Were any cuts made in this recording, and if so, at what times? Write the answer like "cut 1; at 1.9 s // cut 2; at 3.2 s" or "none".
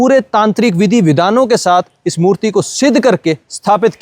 none